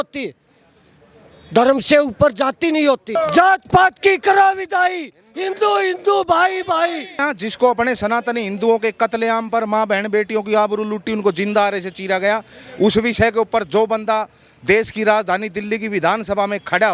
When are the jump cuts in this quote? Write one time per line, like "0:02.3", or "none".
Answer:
0:03.2
0:07.2